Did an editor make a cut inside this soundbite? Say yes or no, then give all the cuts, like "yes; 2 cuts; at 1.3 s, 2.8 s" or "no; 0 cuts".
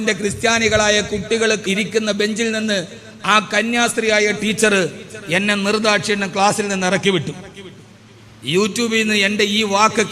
yes; 1 cut; at 1.6 s